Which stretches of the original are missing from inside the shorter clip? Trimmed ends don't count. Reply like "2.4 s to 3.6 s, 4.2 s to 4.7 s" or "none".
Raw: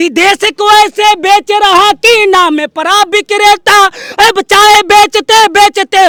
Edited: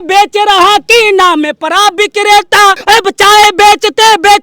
3.9 s to 4.1 s